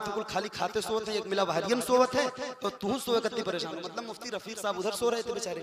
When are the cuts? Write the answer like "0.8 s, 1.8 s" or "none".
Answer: none